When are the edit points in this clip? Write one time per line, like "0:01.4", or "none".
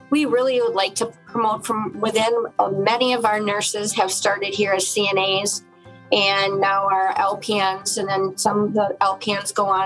none